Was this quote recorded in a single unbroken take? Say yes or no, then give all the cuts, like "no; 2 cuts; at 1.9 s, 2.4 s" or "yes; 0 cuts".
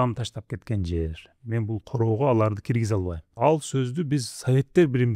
no; 1 cut; at 3.2 s